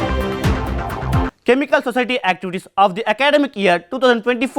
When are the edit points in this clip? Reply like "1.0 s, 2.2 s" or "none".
1.4 s